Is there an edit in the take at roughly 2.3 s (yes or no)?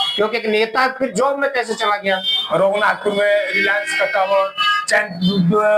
yes